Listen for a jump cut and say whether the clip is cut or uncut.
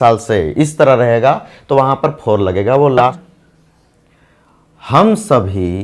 cut